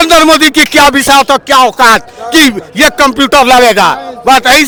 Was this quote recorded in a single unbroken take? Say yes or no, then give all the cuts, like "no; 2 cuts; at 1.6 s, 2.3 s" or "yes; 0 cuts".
yes; 0 cuts